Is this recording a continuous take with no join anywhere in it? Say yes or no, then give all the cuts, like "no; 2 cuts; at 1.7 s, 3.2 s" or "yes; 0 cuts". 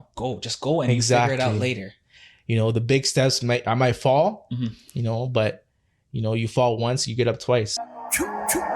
no; 1 cut; at 7.7 s